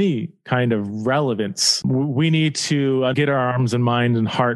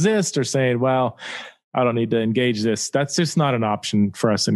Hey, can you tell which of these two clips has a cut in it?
first; 2 cuts; at 1.8 s, 3.1 s

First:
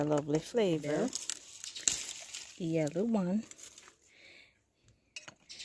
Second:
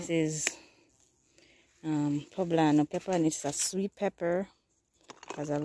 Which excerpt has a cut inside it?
first; 1 cut; at 1.0 s

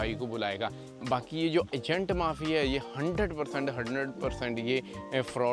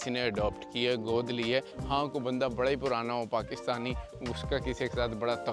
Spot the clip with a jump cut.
second; 1 cut; at 1.8 s

